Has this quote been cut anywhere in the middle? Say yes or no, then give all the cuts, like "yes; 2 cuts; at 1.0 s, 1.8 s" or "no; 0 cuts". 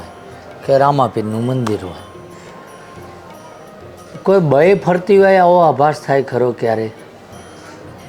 yes; 1 cut; at 2.2 s